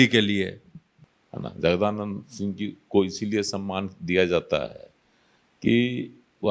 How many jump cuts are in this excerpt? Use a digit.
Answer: 1